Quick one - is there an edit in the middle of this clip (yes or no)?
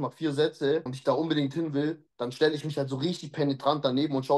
yes